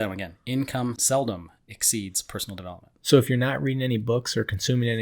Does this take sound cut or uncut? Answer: cut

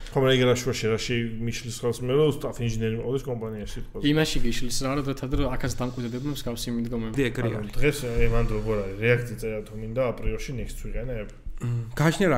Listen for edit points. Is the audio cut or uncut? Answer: cut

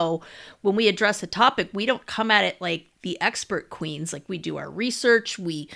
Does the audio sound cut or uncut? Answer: uncut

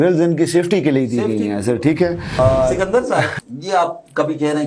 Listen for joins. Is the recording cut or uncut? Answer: cut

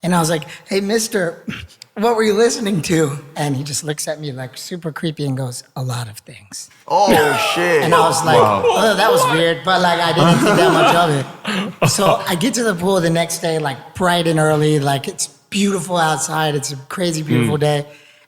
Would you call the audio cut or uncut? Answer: uncut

